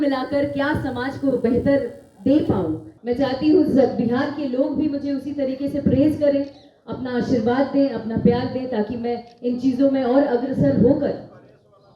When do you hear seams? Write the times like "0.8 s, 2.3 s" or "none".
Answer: 2.9 s